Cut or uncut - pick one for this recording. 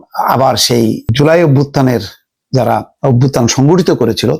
cut